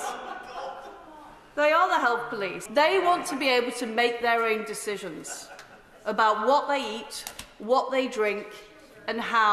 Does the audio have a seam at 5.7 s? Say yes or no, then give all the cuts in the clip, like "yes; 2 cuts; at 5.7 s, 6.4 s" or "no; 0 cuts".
no; 1 cut; at 2.6 s